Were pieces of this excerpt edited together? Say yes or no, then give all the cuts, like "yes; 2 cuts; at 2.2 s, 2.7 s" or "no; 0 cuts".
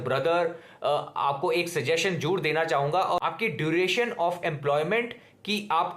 yes; 1 cut; at 3.2 s